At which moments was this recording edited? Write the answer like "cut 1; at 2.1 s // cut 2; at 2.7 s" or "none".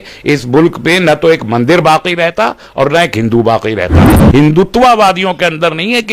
cut 1; at 4.2 s

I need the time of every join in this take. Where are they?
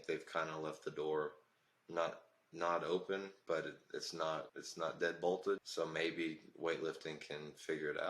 cut 1; at 4.6 s // cut 2; at 5.7 s

